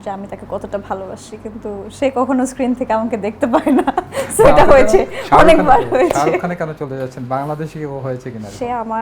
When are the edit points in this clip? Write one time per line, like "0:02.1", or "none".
none